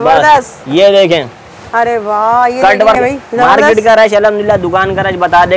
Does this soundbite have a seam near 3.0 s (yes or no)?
yes